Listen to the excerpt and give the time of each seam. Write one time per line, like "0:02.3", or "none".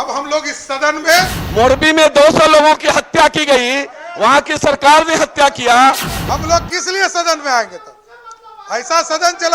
0:01.4
0:06.1